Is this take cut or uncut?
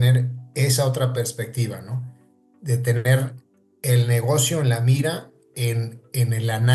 uncut